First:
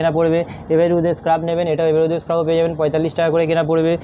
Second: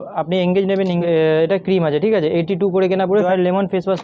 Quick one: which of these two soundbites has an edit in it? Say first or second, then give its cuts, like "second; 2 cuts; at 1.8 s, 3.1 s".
second; 2 cuts; at 1.0 s, 3.2 s